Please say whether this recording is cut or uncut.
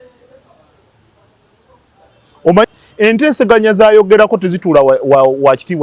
cut